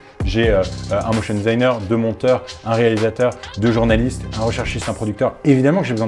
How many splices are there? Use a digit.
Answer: 0